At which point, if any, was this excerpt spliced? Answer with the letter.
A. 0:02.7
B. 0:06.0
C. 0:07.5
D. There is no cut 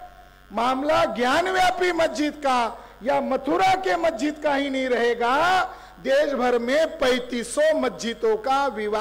D